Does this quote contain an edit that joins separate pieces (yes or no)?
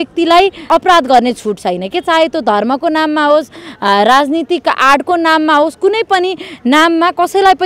no